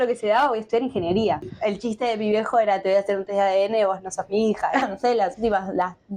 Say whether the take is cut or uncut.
cut